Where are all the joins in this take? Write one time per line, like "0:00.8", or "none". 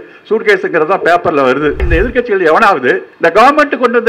0:01.9
0:03.1